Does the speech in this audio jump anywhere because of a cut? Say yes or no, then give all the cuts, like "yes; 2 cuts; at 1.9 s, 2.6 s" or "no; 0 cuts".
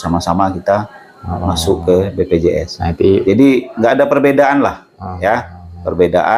no; 0 cuts